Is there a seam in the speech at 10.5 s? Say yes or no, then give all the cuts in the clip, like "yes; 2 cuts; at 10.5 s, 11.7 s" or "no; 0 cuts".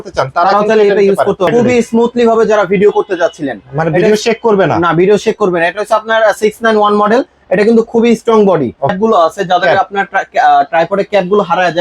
no; 2 cuts; at 1.5 s, 8.9 s